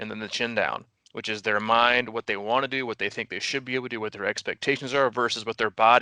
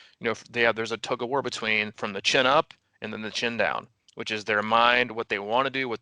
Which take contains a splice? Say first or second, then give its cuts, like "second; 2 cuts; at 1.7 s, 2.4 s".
second; 1 cut; at 2.0 s